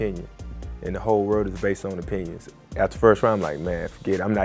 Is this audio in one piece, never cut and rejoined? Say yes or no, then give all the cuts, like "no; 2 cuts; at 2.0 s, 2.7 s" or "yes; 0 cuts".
no; 1 cut; at 2.4 s